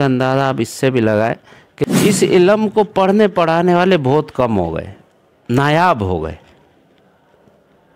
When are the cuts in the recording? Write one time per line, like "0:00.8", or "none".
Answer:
0:01.9